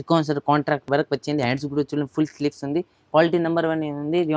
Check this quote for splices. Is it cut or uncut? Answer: uncut